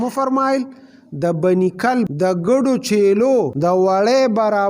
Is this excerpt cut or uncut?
cut